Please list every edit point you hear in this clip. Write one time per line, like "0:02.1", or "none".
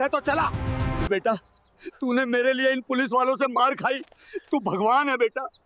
0:01.1